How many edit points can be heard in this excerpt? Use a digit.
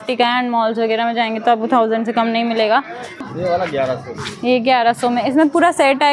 1